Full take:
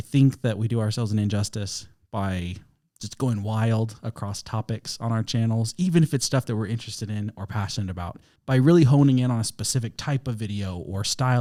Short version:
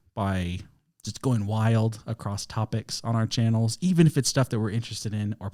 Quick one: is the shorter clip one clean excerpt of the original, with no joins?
yes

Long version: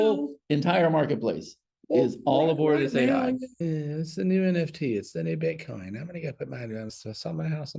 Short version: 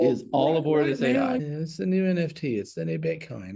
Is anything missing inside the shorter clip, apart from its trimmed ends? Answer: yes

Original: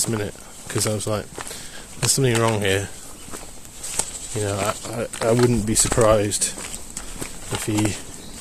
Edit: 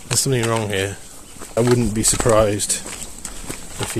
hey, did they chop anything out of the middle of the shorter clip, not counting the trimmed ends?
yes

